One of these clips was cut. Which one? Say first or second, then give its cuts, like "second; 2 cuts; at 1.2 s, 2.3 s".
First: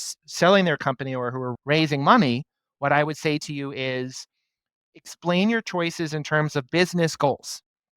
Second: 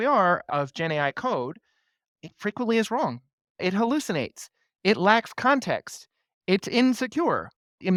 first; 1 cut; at 4.9 s